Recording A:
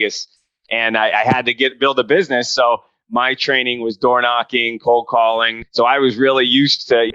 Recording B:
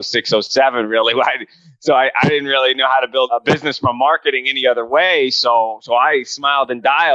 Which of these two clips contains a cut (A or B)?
A